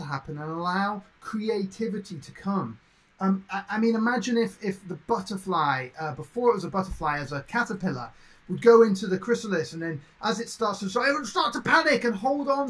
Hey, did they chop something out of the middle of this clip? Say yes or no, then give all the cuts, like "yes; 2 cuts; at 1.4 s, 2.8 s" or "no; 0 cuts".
no; 0 cuts